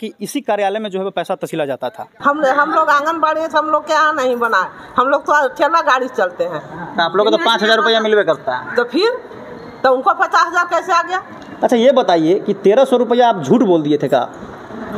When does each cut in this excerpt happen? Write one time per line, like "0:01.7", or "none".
0:02.1
0:11.5